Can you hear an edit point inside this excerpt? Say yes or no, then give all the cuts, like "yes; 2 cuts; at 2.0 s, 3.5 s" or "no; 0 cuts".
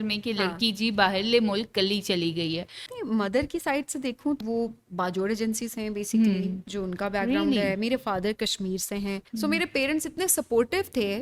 yes; 3 cuts; at 2.9 s, 4.4 s, 9.3 s